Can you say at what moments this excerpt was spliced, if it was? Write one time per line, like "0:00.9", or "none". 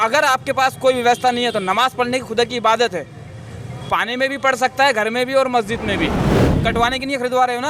0:06.5